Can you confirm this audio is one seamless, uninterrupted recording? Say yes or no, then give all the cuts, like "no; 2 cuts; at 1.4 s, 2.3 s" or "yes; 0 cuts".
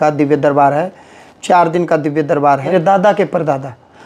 no; 1 cut; at 2.7 s